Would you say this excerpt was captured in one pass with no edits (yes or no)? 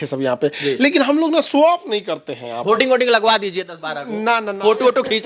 yes